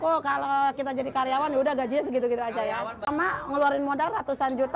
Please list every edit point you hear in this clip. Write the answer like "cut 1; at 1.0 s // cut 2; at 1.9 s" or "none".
cut 1; at 3.1 s